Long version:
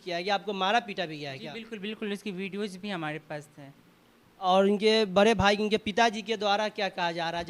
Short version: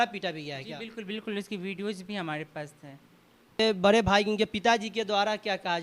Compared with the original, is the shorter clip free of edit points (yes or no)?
no